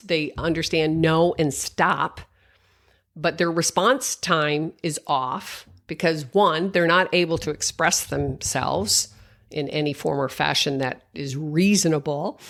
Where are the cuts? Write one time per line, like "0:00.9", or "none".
none